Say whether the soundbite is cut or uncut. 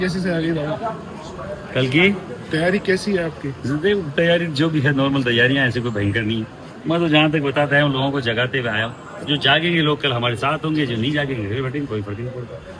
uncut